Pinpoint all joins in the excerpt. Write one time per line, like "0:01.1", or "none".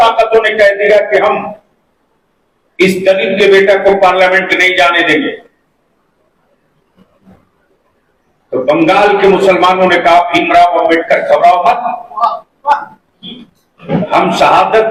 none